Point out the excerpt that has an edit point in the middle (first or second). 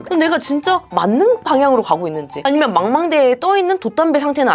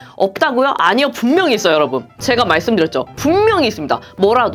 first